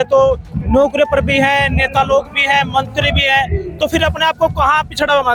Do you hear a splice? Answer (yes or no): no